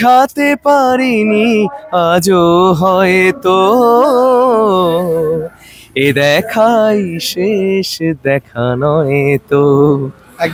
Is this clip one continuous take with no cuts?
yes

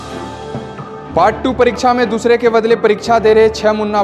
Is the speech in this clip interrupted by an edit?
no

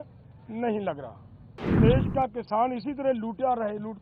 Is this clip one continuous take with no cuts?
no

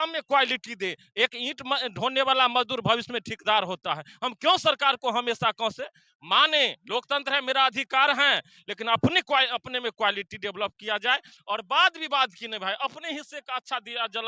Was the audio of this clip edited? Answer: no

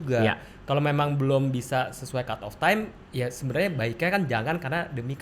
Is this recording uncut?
yes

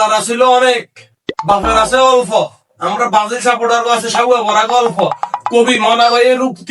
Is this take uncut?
yes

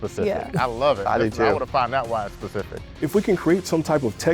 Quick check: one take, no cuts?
no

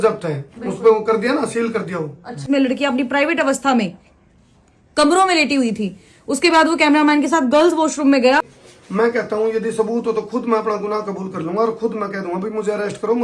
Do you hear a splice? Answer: yes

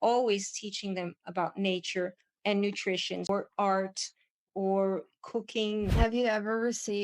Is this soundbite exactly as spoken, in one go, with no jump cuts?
no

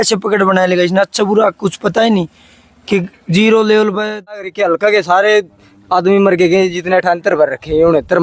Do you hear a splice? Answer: yes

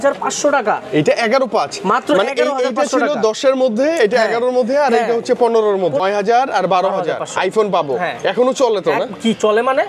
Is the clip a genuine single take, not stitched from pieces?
no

